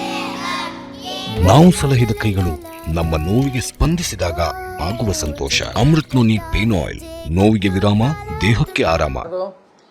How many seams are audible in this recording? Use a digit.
0